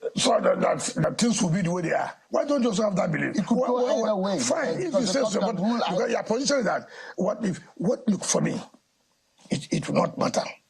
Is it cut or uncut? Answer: cut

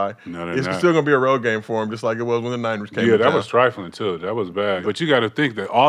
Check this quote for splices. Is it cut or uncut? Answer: cut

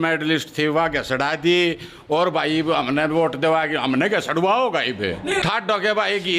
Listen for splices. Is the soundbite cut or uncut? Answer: cut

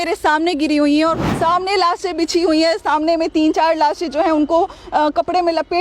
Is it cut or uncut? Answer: cut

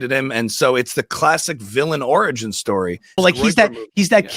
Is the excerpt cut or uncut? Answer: cut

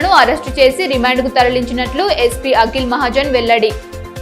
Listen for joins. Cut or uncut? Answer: uncut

